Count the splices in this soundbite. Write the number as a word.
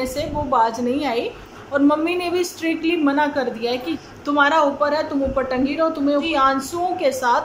three